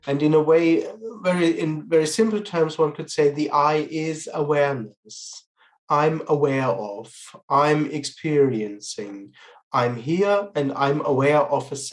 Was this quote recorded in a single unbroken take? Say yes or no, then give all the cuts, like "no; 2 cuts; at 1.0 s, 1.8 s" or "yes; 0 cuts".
yes; 0 cuts